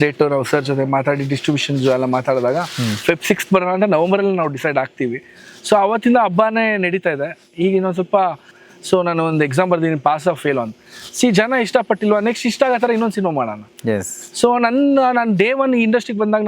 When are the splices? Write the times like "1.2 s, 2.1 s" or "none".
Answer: 8.5 s